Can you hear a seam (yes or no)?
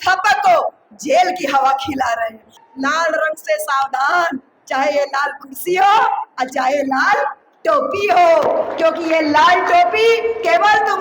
yes